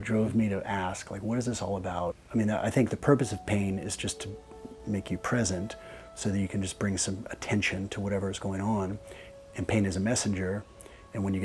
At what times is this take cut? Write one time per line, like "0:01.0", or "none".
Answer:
0:02.2